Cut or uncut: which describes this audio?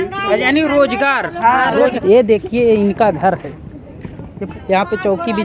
cut